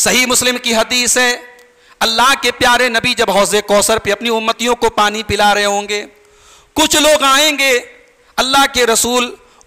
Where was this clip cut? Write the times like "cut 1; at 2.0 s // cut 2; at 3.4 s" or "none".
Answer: none